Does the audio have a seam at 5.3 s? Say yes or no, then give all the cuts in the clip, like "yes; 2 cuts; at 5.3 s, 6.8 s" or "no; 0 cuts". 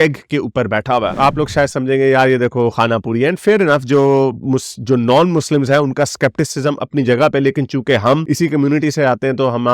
no; 1 cut; at 1.1 s